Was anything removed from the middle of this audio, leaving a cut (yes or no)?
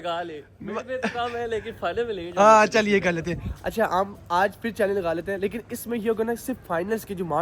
no